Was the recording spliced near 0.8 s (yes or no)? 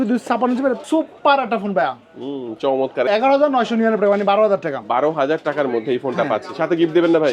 yes